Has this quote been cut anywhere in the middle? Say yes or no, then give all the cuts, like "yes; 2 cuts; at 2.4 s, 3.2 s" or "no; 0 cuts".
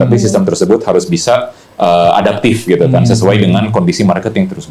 no; 0 cuts